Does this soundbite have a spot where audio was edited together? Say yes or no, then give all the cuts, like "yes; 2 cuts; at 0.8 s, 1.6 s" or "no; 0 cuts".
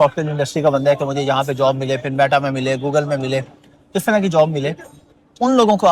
no; 0 cuts